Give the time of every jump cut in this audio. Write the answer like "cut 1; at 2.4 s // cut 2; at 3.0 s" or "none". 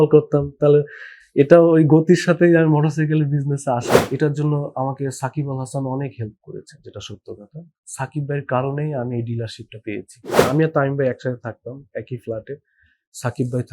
cut 1; at 4.0 s // cut 2; at 10.4 s